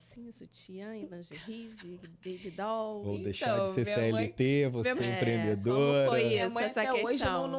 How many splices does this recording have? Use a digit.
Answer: 0